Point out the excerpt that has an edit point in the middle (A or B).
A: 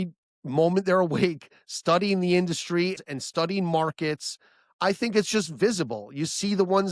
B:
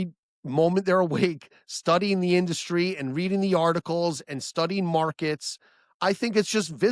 A